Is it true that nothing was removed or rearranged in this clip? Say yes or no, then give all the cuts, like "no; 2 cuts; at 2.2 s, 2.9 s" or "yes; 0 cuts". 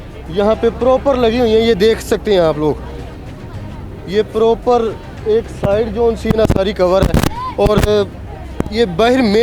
yes; 0 cuts